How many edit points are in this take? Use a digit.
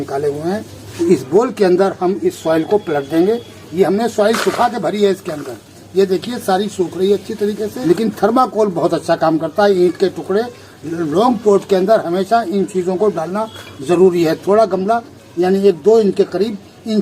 2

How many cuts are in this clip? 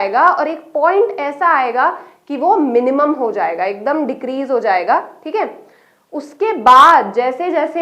0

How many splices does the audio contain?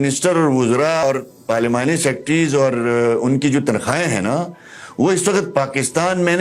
1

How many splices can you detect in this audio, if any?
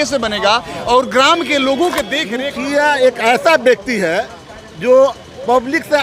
1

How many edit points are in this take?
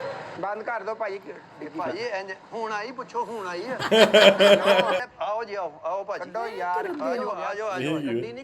1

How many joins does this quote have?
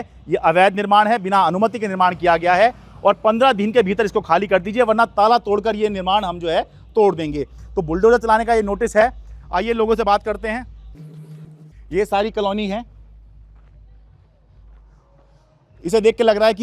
0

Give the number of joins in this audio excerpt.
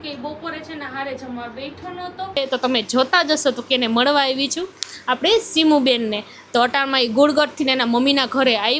1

